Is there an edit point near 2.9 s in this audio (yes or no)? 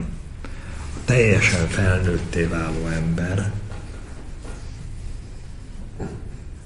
no